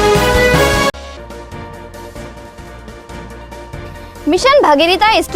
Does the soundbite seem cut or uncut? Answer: cut